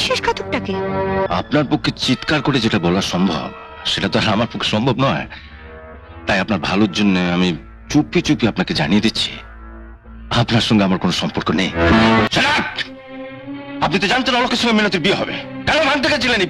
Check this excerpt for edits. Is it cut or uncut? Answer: cut